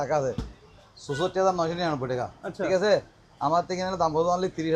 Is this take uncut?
yes; 0 cuts

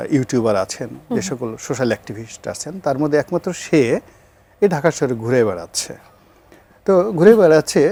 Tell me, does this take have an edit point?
no; 0 cuts

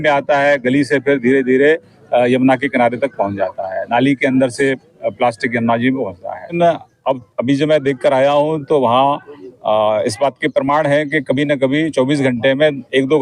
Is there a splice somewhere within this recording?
yes; 1 cut; at 6.5 s

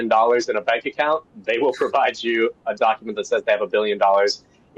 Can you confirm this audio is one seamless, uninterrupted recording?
yes; 0 cuts

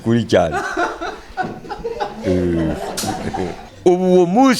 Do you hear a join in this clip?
yes; 1 cut; at 3.6 s

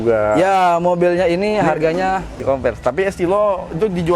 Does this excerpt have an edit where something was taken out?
yes; 1 cut; at 2.4 s

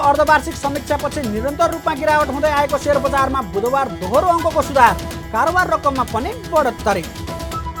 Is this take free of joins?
yes; 0 cuts

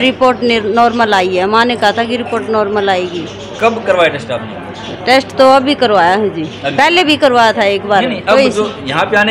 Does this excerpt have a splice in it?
no; 0 cuts

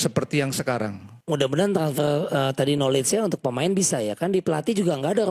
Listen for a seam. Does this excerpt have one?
yes; 1 cut; at 1.1 s

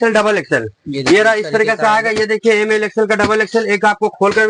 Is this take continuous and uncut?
yes; 0 cuts

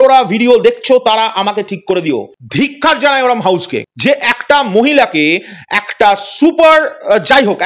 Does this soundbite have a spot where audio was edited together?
yes; 1 cut; at 2.4 s

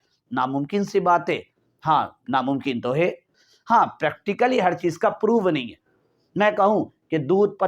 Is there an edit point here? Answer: yes; 1 cut; at 3.4 s

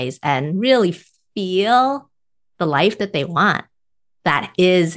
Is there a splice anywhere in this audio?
no; 0 cuts

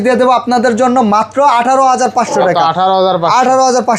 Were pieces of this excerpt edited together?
no; 0 cuts

